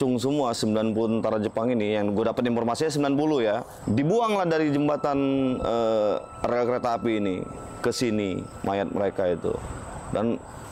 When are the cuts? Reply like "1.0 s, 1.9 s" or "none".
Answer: 3.7 s